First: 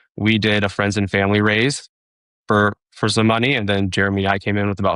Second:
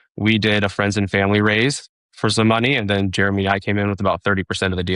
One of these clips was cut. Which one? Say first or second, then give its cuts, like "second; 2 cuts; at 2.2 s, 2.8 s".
second; 1 cut; at 2.1 s